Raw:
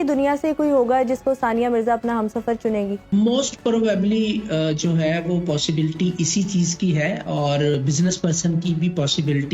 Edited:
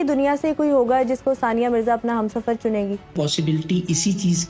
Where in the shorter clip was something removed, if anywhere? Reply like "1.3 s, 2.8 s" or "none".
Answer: 3.1 s